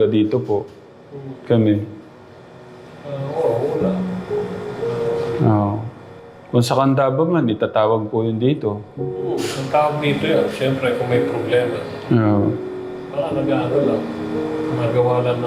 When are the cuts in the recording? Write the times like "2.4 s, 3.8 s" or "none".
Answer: none